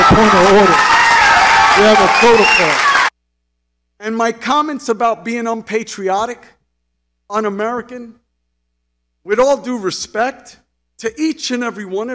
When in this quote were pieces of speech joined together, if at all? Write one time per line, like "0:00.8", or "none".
0:03.1